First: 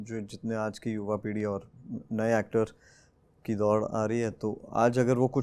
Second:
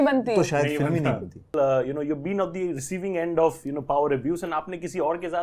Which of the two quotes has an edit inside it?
second; 1 cut; at 1.5 s

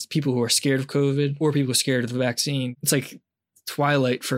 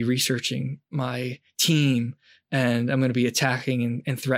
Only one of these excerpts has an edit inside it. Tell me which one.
first; 2 cuts; at 1.3 s, 2.7 s

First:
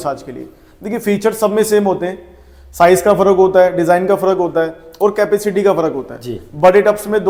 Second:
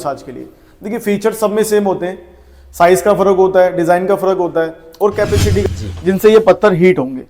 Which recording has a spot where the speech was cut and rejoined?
second; 1 cut; at 5.6 s

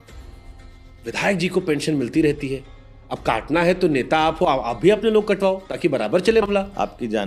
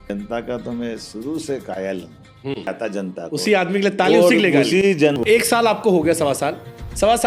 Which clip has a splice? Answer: second; 2 cuts; at 2.7 s, 5.2 s

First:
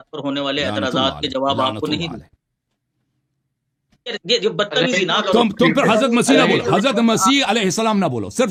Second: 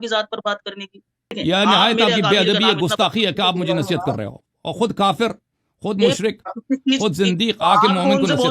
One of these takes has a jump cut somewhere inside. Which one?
second; 1 cut; at 1.4 s

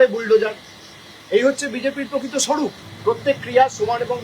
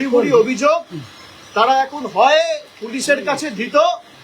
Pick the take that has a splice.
first; 1 cut; at 2.9 s

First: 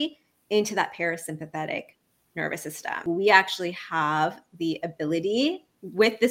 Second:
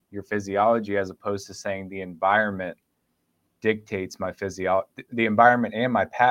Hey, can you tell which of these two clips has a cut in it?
first; 1 cut; at 3.0 s

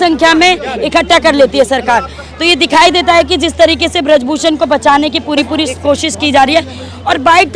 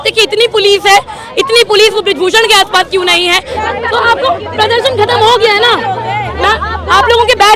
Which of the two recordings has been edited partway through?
second; 2 cuts; at 3.5 s, 6.3 s

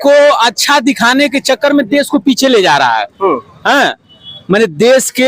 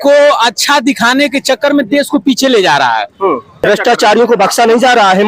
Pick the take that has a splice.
second; 1 cut; at 3.6 s

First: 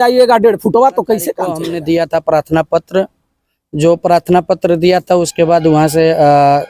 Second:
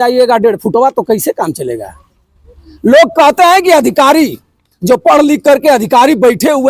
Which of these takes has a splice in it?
first; 1 cut; at 1.6 s

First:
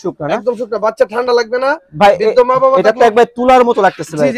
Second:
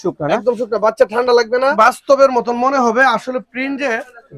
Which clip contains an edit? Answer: second; 1 cut; at 1.7 s

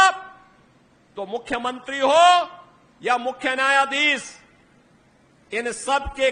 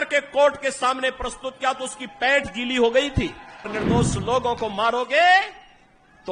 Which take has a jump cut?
second; 1 cut; at 3.7 s

